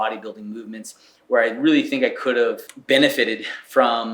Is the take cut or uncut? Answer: cut